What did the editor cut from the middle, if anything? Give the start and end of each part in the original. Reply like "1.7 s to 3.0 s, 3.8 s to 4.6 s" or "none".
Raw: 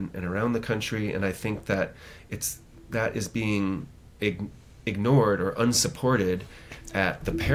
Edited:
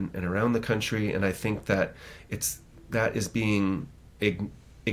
none